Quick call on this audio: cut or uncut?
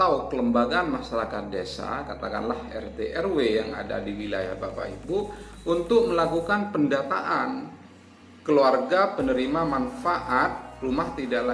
uncut